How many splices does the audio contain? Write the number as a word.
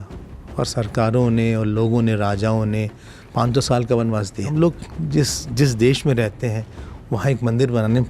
one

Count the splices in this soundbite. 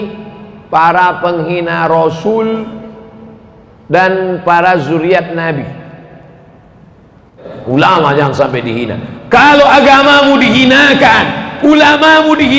one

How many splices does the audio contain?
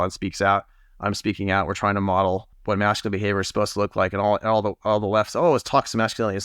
one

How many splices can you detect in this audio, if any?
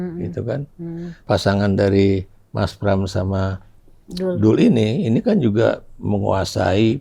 one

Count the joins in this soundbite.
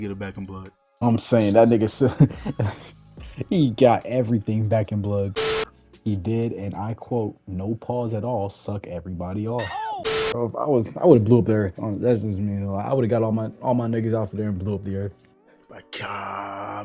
two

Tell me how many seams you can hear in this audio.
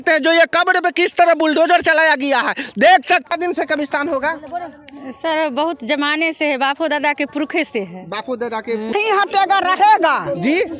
two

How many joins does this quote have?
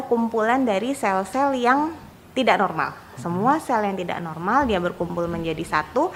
zero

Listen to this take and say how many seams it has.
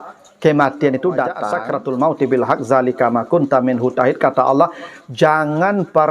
one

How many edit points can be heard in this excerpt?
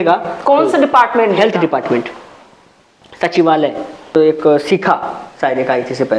one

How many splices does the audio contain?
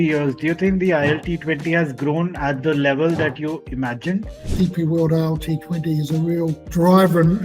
one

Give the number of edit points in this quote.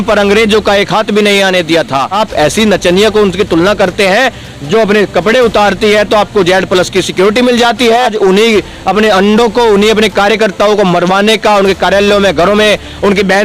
two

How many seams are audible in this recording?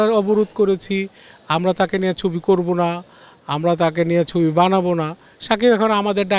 zero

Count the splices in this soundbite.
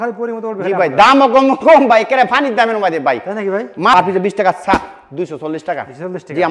one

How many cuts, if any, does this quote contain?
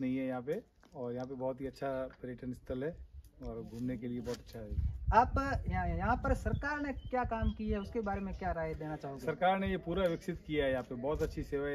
zero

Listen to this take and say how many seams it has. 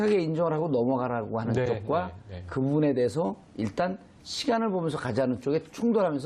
one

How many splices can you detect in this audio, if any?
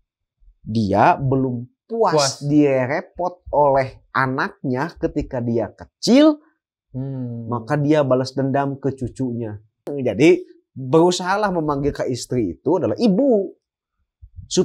one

